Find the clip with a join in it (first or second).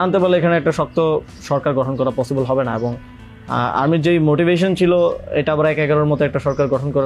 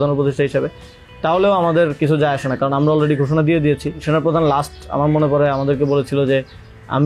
second